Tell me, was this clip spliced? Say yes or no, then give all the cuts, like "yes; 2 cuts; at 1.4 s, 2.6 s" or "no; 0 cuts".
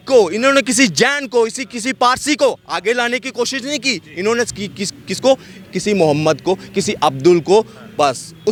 no; 0 cuts